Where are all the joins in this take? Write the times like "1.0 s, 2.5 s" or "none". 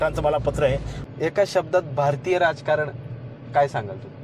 0.9 s